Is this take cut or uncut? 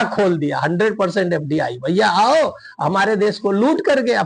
uncut